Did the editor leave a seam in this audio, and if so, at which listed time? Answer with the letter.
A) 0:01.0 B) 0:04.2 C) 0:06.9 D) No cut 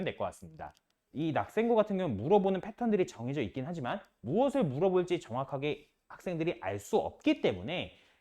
A